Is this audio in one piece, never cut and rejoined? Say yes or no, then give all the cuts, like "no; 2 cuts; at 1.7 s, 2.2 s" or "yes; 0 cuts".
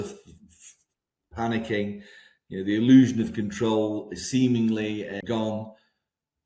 no; 1 cut; at 5.2 s